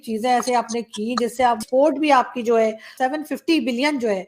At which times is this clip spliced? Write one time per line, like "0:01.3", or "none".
0:01.6
0:02.9